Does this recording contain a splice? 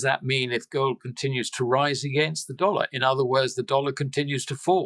no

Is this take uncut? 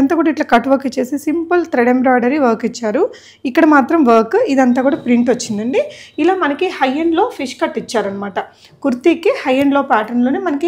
yes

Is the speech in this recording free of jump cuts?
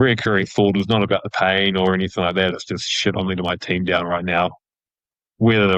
yes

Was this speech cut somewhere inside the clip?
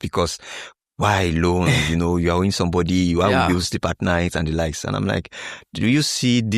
no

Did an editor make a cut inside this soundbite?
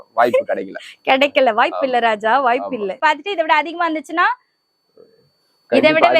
yes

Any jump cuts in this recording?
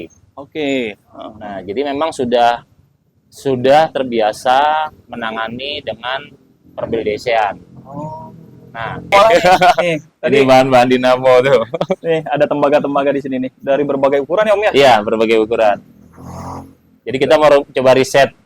yes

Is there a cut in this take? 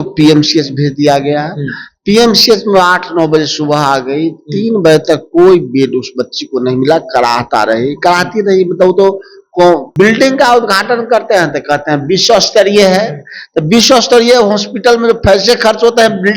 yes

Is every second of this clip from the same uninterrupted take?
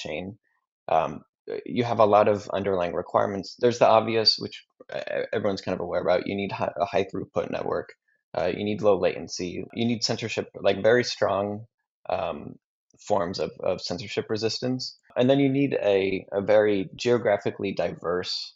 no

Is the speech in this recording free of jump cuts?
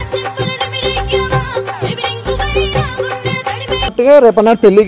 no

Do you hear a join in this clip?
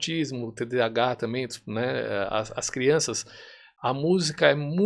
no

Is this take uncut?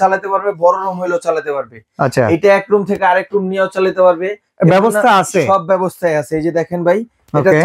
yes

